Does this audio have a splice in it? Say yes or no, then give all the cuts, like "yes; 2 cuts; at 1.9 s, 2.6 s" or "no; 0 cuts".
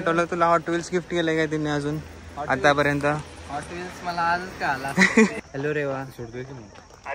yes; 1 cut; at 5.4 s